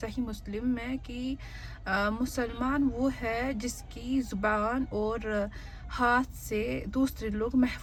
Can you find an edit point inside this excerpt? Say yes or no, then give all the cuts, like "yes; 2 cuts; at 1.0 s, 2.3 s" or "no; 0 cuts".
no; 0 cuts